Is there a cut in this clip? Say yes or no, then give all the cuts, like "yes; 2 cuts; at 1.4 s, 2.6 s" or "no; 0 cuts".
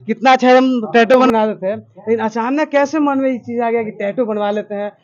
yes; 1 cut; at 1.3 s